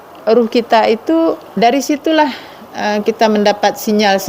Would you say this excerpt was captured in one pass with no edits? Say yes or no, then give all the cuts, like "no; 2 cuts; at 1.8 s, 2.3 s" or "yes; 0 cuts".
no; 1 cut; at 1.5 s